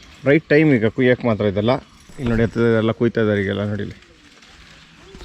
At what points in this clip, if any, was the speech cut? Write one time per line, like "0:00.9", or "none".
0:02.1

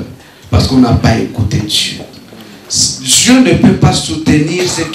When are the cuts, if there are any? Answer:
none

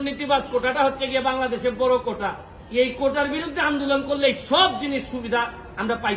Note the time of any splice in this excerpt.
none

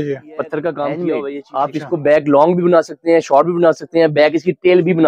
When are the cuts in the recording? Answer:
0:01.3

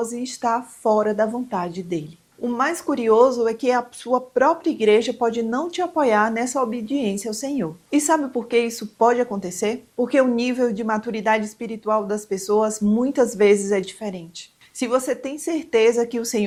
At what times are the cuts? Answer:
none

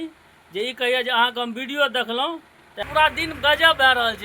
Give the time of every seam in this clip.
0:02.8

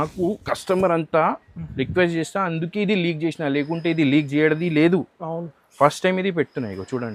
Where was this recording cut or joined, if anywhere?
none

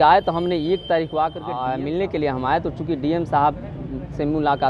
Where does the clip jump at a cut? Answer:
0:01.5

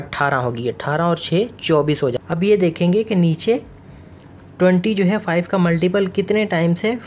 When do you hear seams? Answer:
0:02.2

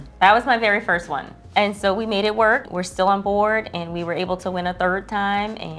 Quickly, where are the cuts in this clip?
0:01.3
0:02.7

